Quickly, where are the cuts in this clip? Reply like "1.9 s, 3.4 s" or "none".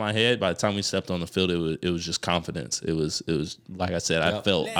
none